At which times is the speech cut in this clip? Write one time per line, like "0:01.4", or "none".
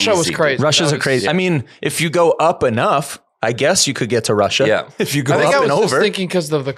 none

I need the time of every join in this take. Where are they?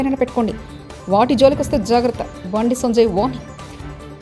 none

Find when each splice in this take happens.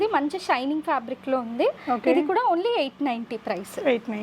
none

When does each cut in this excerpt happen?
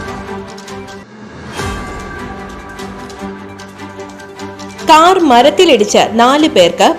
0:01.1
0:03.6
0:04.5

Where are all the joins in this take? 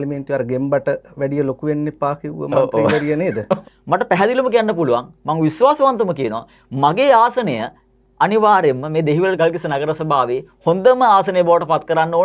0:03.7
0:09.4

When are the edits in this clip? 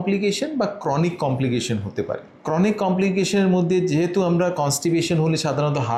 none

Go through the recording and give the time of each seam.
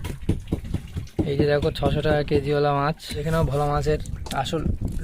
0:03.2

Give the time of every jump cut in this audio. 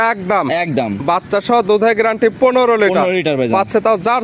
none

